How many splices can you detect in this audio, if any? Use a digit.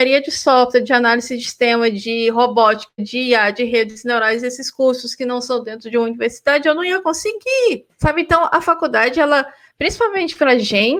0